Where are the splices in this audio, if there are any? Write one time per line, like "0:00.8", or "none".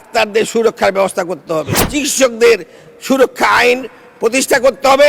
0:01.8